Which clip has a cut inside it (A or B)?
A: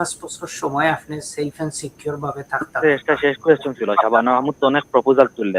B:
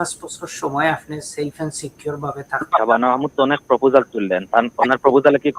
B